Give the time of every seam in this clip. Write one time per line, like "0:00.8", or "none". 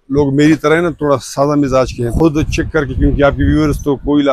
0:02.1